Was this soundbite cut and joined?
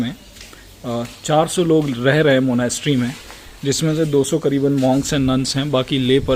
no; 0 cuts

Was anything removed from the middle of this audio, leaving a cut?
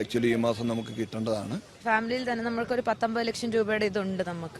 yes; 1 cut; at 1.7 s

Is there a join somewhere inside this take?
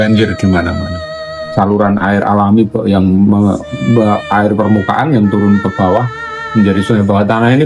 yes; 1 cut; at 1.3 s

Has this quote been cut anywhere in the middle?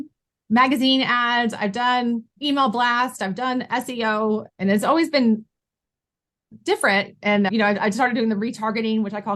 yes; 2 cuts; at 2.3 s, 4.5 s

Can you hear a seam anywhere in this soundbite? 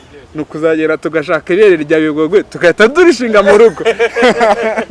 no; 0 cuts

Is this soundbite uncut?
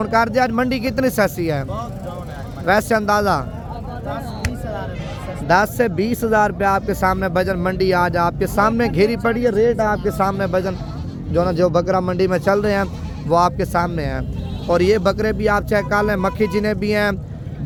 yes; 0 cuts

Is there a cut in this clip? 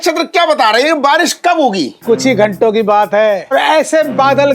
yes; 2 cuts; at 1.9 s, 3.5 s

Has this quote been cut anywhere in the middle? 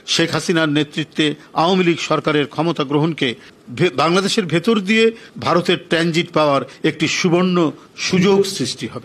yes; 1 cut; at 3.5 s

